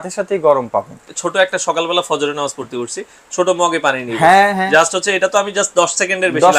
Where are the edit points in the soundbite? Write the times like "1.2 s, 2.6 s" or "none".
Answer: 1.0 s